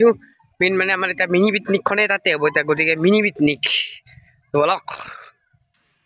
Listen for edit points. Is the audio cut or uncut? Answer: uncut